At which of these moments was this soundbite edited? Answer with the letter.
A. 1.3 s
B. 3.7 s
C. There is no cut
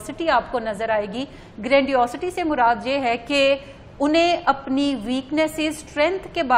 C